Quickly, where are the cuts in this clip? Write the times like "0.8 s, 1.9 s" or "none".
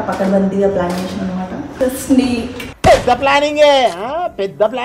1.6 s